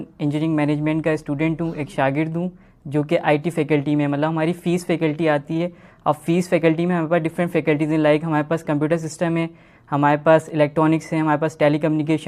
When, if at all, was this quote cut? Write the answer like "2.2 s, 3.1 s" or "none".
none